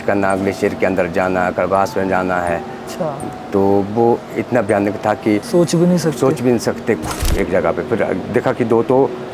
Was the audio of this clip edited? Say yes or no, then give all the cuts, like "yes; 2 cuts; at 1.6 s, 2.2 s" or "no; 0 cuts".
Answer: yes; 2 cuts; at 5.4 s, 7.0 s